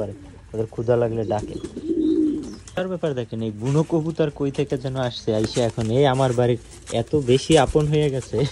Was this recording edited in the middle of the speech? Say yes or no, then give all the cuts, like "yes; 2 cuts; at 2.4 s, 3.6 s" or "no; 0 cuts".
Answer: yes; 1 cut; at 2.7 s